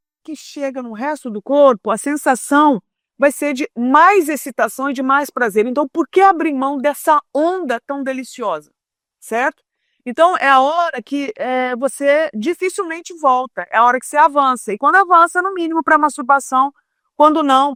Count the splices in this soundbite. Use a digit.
0